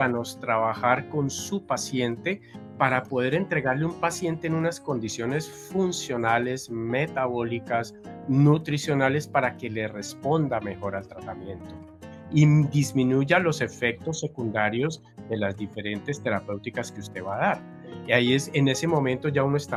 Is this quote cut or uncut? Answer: uncut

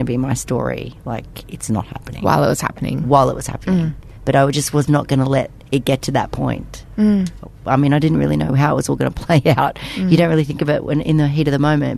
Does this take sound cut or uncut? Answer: uncut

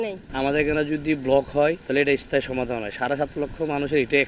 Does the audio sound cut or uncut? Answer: cut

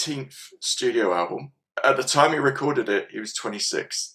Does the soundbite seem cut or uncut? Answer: cut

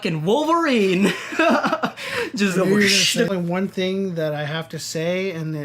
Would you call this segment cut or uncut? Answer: cut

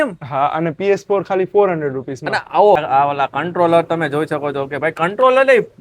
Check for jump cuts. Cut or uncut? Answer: cut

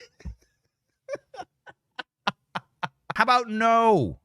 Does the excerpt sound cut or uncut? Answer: cut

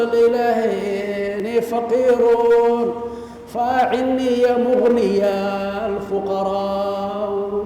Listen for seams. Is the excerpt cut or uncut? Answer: cut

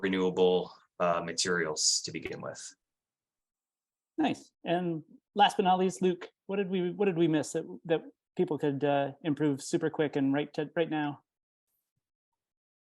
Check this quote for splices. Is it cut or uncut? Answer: uncut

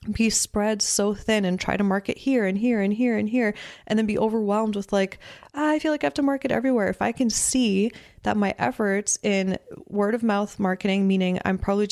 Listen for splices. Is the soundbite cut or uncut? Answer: uncut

